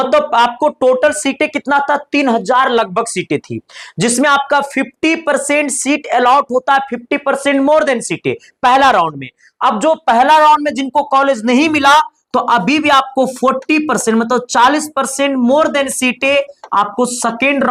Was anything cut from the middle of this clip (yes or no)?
no